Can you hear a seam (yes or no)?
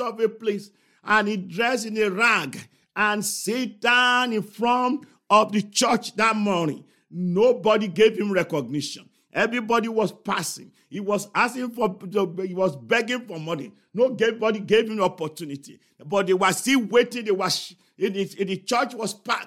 no